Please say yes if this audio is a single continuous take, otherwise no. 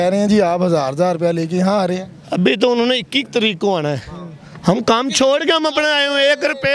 yes